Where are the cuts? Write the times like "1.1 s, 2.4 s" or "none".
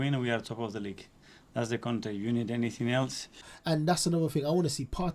3.5 s